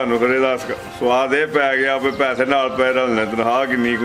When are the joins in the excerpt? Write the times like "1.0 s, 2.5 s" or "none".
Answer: none